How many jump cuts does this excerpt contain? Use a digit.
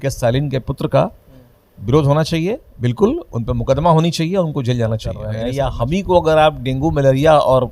1